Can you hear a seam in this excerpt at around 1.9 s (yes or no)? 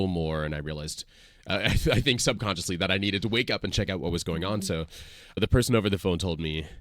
no